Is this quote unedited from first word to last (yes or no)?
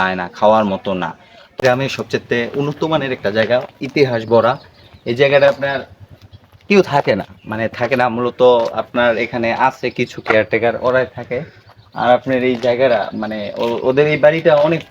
no